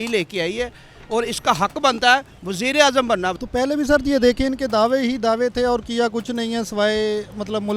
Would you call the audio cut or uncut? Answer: cut